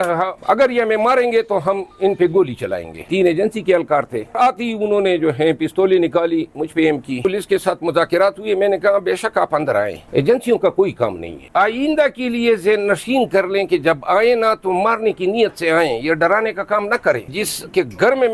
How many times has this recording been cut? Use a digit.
5